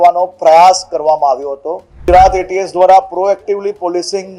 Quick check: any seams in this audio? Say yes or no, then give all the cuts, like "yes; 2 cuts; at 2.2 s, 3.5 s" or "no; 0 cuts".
yes; 1 cut; at 1.9 s